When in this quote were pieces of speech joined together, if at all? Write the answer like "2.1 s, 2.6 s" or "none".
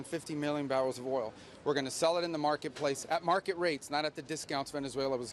none